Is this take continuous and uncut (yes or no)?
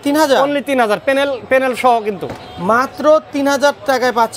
yes